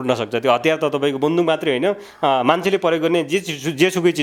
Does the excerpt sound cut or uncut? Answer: uncut